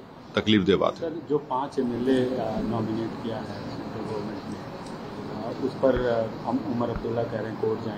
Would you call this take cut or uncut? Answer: uncut